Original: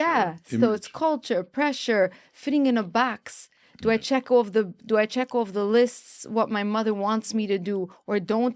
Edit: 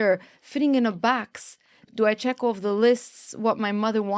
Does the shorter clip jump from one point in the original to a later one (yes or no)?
yes